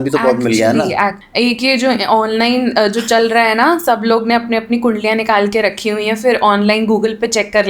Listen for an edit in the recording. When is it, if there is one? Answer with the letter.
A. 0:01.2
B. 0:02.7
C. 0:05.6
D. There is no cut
A